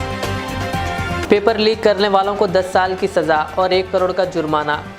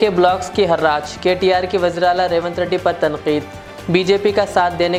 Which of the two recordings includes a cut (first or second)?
first